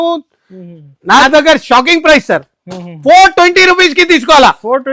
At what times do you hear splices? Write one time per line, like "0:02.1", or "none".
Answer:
0:01.2